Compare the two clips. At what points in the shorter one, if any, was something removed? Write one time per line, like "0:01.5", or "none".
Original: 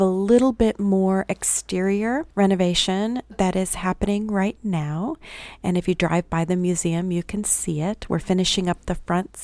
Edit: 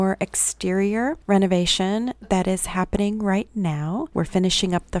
0:04.1